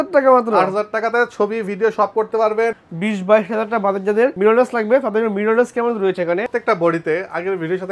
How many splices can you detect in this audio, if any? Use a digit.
2